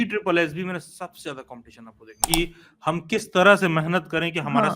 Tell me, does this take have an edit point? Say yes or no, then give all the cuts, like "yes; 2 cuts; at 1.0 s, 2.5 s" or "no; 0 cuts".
yes; 1 cut; at 2.2 s